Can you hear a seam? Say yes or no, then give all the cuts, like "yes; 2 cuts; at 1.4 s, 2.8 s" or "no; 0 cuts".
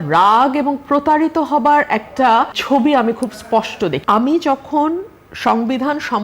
yes; 2 cuts; at 2.6 s, 4.0 s